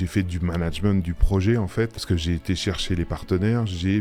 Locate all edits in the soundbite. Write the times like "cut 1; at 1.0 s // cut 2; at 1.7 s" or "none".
cut 1; at 1.9 s

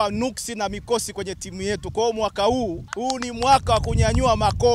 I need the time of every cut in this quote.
none

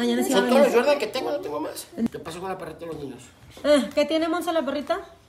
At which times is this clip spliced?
cut 1; at 2.1 s

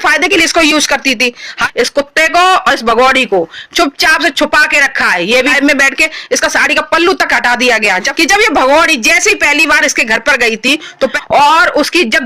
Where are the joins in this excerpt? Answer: cut 1; at 1.6 s // cut 2; at 5.5 s // cut 3; at 8.1 s // cut 4; at 11.2 s

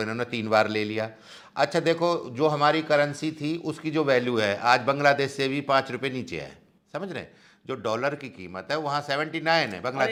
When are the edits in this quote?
none

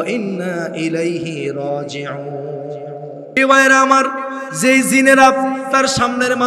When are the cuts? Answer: cut 1; at 3.4 s

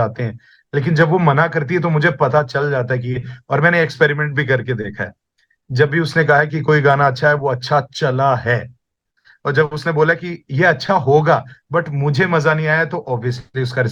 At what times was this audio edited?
none

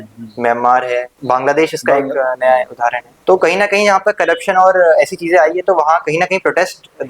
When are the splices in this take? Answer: cut 1; at 1.1 s // cut 2; at 3.1 s

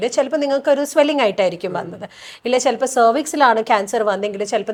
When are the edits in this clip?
none

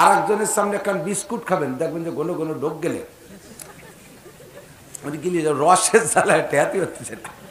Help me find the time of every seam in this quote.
none

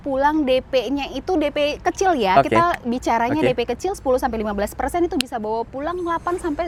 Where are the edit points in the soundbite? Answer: none

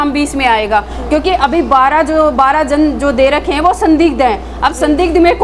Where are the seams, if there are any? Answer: none

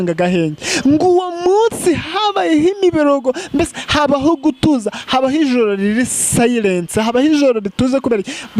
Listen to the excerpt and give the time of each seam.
none

